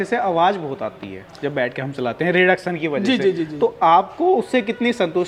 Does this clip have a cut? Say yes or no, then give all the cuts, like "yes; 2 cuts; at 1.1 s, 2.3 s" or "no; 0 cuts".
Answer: no; 0 cuts